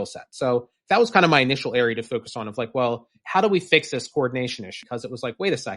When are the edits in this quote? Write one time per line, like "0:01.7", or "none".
0:04.8